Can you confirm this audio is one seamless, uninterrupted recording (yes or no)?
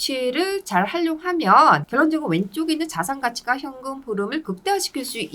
yes